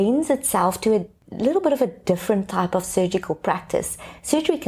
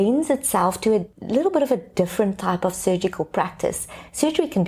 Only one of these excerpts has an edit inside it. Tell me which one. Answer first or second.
second